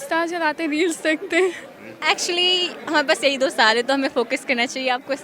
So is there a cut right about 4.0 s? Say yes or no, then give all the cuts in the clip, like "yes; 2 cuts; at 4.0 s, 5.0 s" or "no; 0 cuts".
no; 1 cut; at 1.9 s